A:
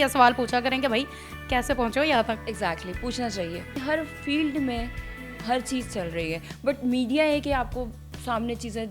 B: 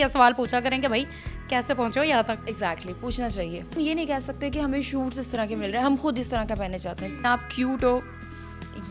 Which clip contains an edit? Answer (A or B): B